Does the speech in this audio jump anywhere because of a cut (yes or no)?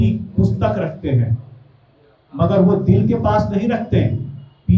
no